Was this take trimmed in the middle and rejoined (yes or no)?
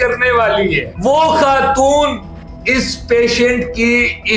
no